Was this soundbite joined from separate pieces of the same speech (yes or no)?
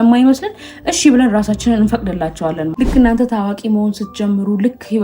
yes